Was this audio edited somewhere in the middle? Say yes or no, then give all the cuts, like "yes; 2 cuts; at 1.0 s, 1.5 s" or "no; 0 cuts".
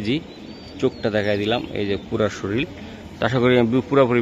no; 0 cuts